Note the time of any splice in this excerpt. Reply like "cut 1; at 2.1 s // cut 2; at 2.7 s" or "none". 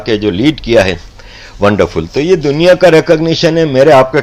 none